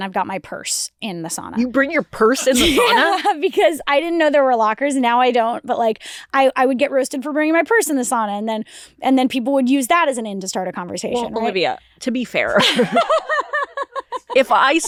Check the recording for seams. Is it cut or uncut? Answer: uncut